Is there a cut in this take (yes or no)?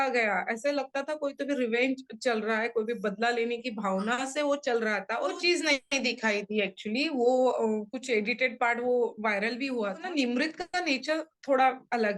yes